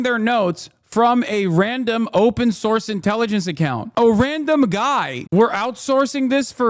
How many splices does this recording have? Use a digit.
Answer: 1